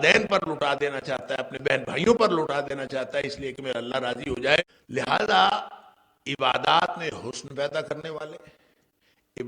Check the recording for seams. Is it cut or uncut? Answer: cut